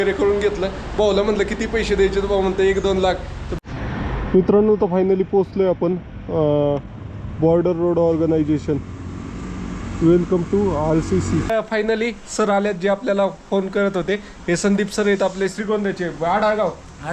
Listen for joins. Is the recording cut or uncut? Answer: cut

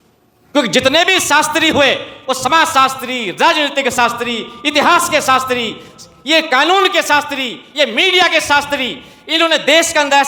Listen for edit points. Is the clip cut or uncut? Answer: uncut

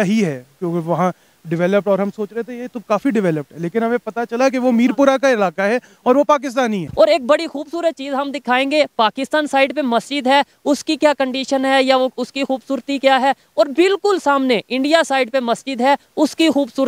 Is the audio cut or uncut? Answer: cut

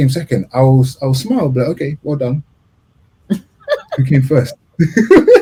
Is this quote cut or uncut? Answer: uncut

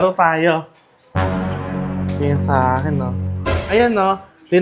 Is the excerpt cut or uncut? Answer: cut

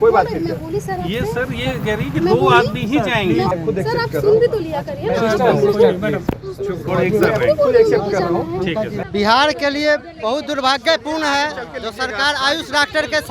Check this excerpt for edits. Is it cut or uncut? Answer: cut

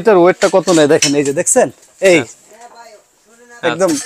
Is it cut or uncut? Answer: uncut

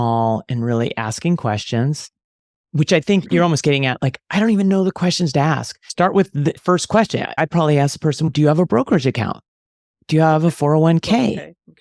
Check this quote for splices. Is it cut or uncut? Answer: uncut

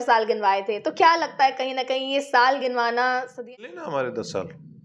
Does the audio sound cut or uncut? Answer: cut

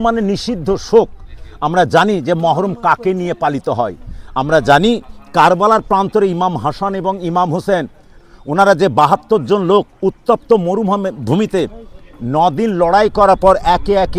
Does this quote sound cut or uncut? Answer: uncut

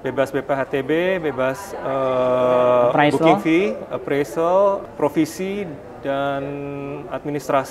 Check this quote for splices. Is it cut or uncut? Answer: uncut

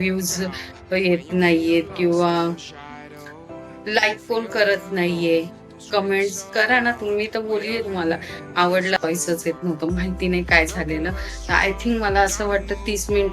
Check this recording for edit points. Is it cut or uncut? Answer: cut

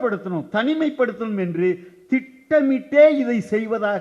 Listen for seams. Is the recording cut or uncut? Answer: uncut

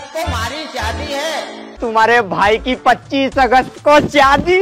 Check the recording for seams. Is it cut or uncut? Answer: cut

